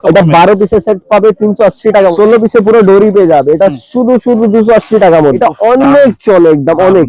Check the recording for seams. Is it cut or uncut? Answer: cut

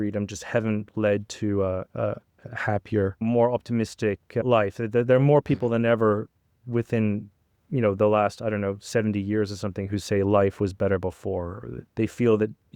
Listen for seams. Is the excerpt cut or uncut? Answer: cut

